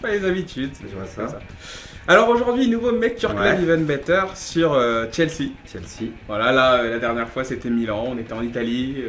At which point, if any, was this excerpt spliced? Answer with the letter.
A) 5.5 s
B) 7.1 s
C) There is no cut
A